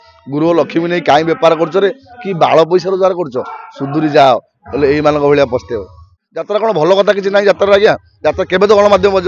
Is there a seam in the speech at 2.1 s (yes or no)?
no